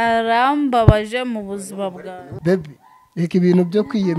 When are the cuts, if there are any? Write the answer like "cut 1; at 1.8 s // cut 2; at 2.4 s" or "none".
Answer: cut 1; at 2.2 s